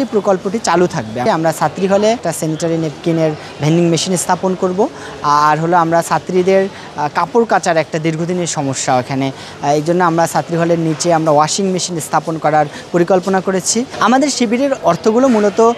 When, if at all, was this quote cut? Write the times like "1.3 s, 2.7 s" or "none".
1.2 s, 2.3 s, 13.9 s